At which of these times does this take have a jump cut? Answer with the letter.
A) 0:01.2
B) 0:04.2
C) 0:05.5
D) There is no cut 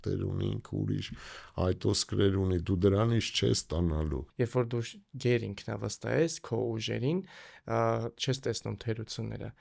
B